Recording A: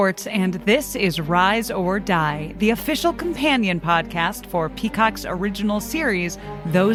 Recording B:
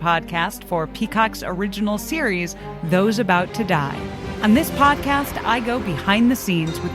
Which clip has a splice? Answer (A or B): B